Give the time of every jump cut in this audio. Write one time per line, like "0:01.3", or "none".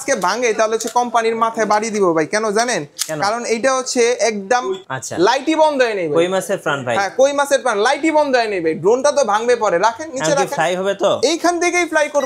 0:04.8